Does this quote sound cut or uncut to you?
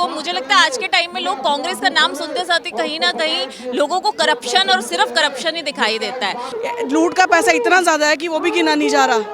cut